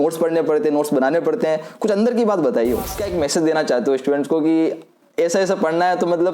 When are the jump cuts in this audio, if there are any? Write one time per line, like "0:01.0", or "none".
0:03.0